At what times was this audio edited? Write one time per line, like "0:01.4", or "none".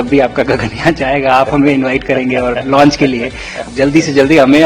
0:03.6